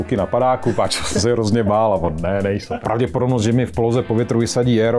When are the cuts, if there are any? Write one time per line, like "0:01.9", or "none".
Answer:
0:02.7